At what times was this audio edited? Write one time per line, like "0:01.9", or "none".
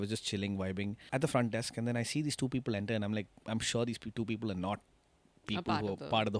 0:01.0